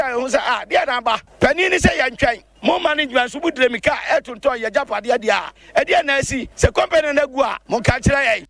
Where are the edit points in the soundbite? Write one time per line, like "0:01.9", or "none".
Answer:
0:01.3
0:02.5
0:05.5
0:06.4
0:07.6